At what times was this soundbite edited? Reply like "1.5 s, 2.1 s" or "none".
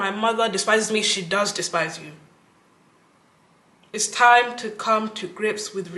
none